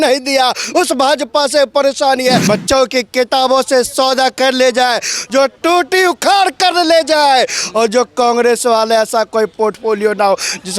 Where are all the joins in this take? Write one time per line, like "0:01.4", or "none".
0:02.4